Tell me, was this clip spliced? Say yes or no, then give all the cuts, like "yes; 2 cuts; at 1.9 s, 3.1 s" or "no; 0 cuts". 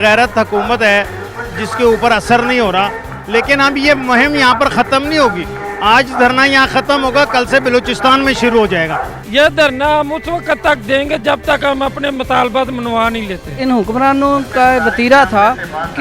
yes; 2 cuts; at 9.1 s, 13.6 s